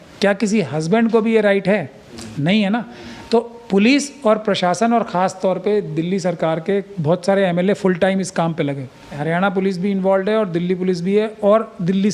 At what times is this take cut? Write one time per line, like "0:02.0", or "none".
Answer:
0:09.2